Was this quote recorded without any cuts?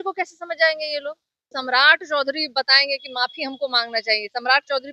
no; 1 cut; at 1.5 s

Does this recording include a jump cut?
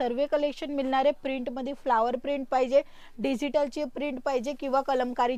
no; 0 cuts

